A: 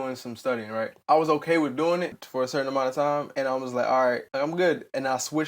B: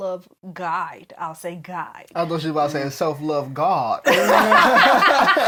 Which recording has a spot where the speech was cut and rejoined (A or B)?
A